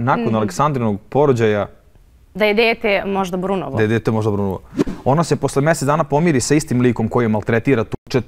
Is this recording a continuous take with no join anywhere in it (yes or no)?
no